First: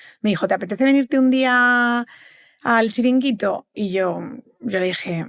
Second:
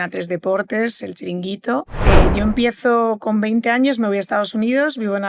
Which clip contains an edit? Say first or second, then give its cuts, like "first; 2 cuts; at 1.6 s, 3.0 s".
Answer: second; 1 cut; at 1.9 s